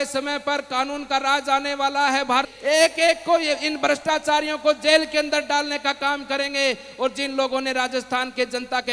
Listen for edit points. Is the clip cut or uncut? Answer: cut